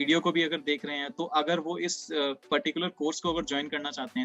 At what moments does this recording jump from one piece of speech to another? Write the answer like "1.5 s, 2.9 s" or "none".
none